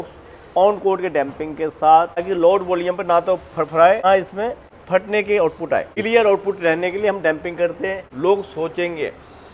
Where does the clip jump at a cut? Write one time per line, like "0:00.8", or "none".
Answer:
0:02.3
0:04.2
0:06.0
0:08.0